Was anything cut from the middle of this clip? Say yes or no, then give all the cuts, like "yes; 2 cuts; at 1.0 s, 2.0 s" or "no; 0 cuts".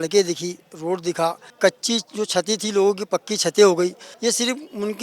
yes; 2 cuts; at 1.5 s, 4.1 s